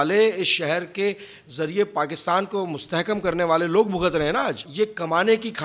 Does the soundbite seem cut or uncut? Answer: cut